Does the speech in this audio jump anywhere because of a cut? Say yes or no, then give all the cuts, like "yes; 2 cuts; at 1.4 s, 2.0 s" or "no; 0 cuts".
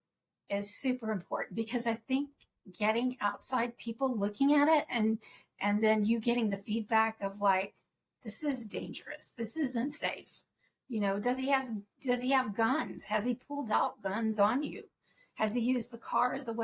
no; 0 cuts